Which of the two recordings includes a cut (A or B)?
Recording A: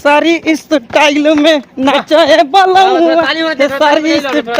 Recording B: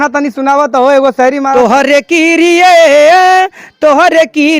B